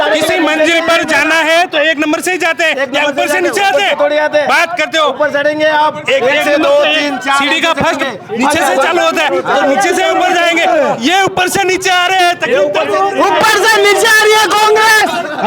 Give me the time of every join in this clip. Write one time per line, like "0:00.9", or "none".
none